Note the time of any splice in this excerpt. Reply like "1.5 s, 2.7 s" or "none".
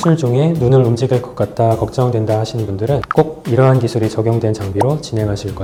none